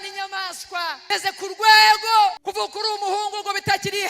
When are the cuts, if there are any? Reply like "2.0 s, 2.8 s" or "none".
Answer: 1.0 s, 2.4 s